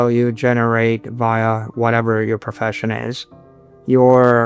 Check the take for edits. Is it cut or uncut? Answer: uncut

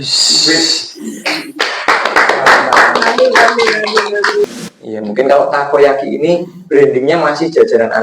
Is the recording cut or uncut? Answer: cut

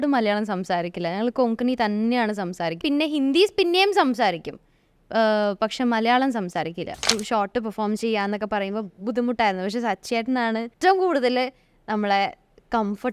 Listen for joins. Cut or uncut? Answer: cut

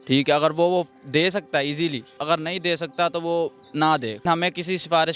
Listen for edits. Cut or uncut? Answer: cut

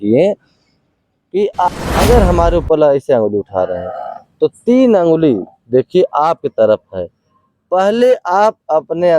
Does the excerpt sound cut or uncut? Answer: cut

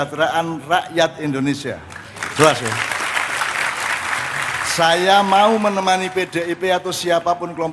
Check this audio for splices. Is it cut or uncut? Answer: uncut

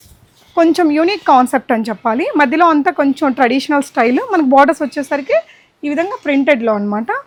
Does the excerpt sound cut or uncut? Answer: uncut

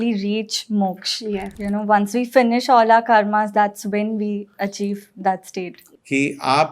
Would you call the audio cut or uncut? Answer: cut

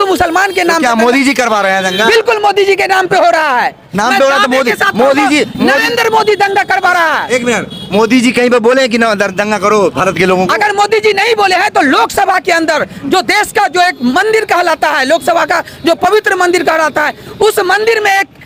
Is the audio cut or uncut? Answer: uncut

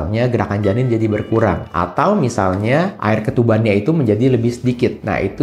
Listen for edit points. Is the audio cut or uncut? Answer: uncut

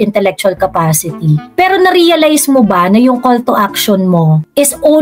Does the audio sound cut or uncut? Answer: uncut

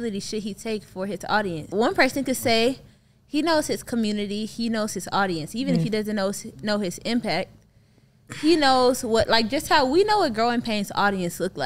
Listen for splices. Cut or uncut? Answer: cut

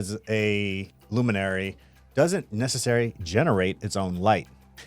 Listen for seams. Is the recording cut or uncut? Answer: cut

